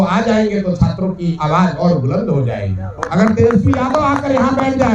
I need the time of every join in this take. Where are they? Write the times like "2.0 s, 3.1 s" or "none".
2.9 s